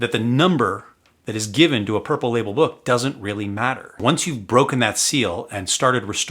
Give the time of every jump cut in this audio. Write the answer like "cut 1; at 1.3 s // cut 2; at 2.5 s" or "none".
none